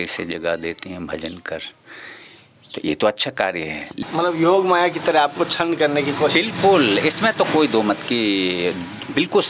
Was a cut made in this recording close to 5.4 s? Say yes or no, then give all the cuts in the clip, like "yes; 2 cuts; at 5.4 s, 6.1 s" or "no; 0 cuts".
no; 1 cut; at 3.9 s